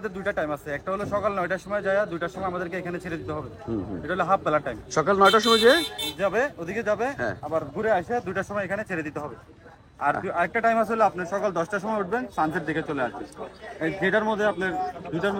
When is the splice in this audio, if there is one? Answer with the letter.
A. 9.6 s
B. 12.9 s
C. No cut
C